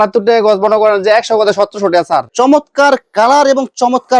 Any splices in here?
yes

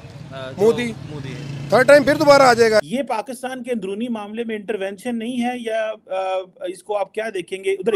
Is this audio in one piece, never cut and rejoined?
no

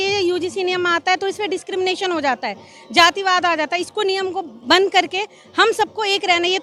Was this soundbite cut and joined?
no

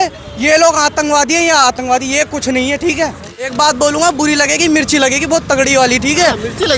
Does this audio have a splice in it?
yes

